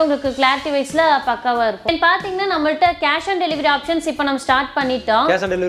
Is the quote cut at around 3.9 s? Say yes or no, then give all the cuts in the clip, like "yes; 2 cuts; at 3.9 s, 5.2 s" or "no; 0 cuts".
no; 1 cut; at 1.8 s